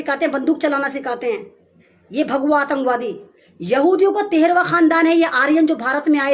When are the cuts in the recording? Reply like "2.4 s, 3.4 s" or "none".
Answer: none